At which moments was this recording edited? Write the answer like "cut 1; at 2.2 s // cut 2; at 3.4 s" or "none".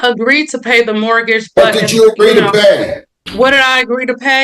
cut 1; at 3.2 s